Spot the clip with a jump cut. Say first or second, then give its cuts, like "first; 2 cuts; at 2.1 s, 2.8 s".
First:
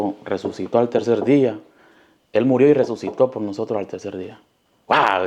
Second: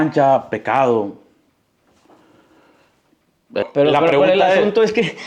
second; 1 cut; at 3.6 s